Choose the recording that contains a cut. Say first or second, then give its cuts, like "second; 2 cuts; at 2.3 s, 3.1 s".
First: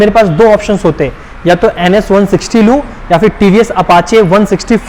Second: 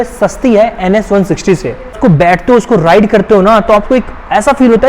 second; 1 cut; at 1.8 s